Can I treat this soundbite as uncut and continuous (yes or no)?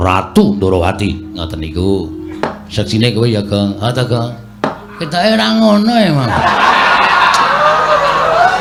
yes